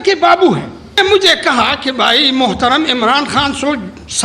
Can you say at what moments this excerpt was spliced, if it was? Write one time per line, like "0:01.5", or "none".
0:01.0